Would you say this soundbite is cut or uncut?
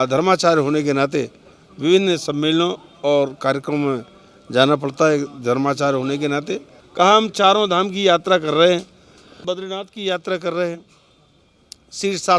cut